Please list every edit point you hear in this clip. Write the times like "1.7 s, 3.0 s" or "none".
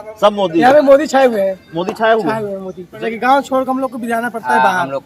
3.0 s